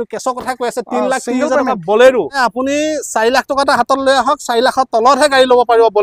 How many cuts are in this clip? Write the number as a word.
one